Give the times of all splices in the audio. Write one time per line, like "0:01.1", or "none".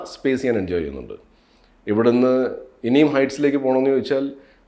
none